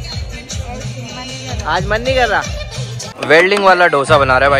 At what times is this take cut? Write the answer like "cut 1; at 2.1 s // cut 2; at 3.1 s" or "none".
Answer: cut 1; at 3.0 s